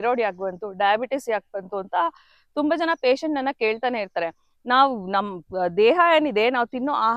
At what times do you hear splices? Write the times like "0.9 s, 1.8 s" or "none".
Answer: none

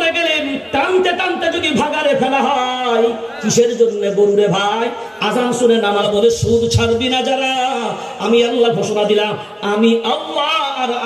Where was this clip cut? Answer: 6.0 s

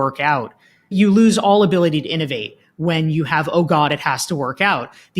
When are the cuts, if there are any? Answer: 0.9 s

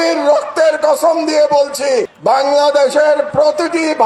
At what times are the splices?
none

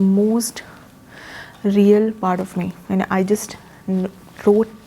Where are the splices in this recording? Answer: none

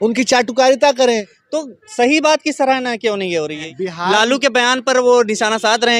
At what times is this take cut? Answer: 1.3 s, 3.7 s

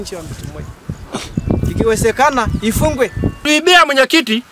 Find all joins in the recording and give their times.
3.4 s

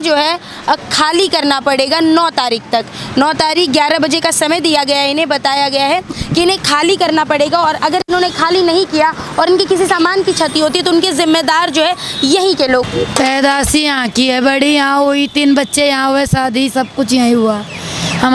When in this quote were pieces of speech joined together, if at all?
12.8 s

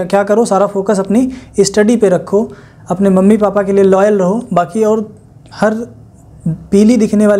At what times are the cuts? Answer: none

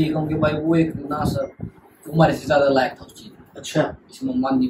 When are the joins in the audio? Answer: none

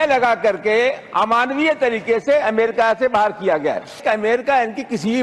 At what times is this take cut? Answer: 4.0 s

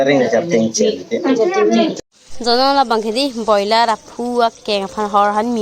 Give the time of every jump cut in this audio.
1.9 s

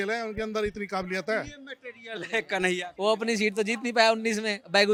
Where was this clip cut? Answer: none

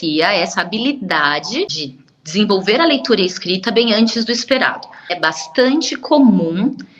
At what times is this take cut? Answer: 1.7 s, 5.2 s

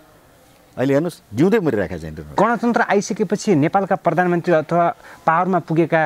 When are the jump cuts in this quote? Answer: 2.2 s

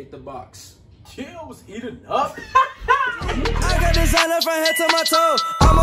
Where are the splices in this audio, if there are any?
3.6 s

